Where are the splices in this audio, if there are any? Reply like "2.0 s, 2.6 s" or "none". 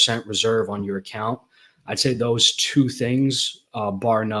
none